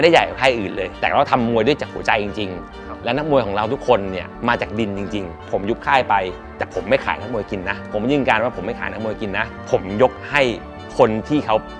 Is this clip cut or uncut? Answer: cut